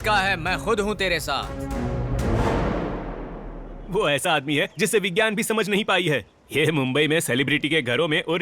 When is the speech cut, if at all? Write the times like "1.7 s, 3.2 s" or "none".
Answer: 1.6 s, 3.8 s